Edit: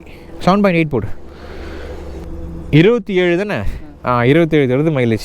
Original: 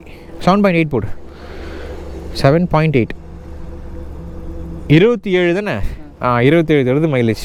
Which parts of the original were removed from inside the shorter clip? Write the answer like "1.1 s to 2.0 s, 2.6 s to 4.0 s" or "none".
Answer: 2.2 s to 4.4 s